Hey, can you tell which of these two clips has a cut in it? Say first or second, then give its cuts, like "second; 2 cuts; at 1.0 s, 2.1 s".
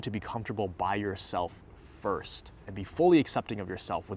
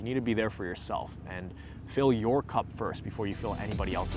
first; 1 cut; at 2.6 s